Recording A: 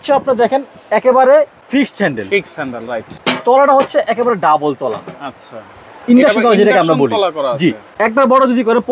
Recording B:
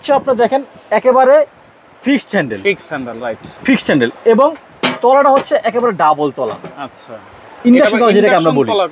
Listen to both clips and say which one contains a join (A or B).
A